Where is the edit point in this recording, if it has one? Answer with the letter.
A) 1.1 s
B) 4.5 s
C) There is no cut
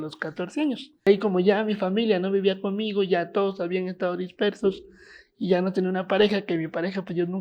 A